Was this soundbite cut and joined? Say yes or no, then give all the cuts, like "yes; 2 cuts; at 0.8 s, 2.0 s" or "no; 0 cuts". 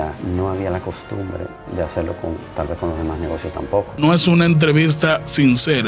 yes; 1 cut; at 3.9 s